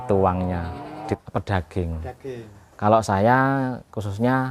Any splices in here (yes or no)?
yes